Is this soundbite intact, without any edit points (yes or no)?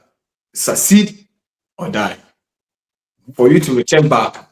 yes